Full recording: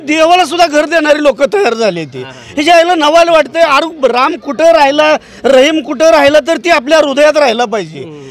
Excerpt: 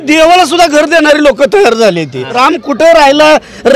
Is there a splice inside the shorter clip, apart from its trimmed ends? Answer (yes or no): yes